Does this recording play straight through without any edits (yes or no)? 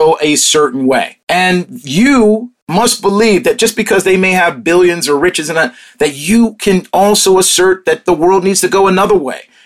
no